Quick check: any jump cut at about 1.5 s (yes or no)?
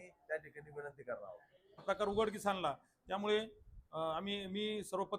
yes